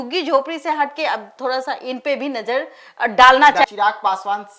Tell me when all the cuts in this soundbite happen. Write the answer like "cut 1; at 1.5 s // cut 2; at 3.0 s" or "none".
cut 1; at 3.6 s